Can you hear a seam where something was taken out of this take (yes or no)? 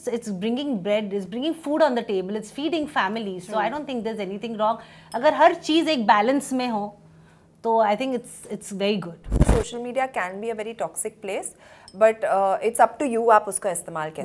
yes